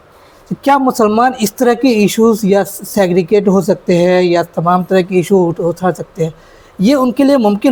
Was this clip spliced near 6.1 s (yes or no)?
no